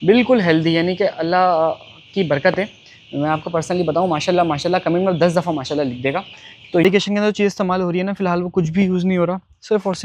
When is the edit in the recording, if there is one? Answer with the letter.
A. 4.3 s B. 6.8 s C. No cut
B